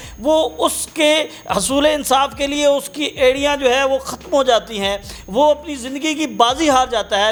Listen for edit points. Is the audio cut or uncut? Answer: uncut